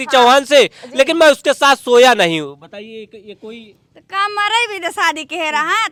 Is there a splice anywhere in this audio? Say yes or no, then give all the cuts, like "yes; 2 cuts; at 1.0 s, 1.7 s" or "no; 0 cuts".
no; 0 cuts